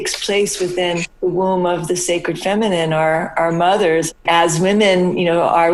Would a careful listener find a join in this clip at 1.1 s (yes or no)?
yes